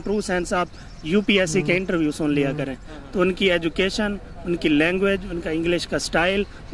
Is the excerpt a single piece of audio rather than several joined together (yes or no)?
yes